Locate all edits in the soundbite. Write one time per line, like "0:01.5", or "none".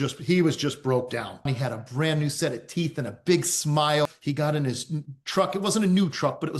0:01.5
0:04.1